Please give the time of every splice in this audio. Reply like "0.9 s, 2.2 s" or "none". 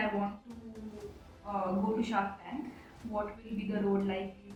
none